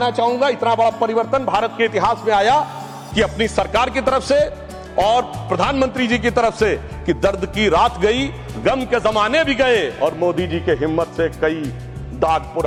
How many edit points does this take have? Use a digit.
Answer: 0